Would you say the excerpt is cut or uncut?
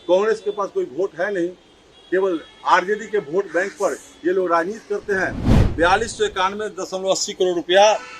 cut